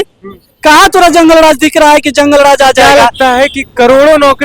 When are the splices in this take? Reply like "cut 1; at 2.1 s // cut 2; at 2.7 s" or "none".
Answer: cut 1; at 2.8 s